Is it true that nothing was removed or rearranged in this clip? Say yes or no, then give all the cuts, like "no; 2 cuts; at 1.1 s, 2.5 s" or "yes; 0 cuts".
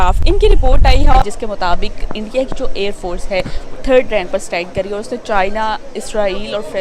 no; 1 cut; at 1.2 s